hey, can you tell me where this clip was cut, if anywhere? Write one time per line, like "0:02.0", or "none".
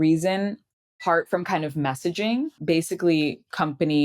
0:01.0
0:02.6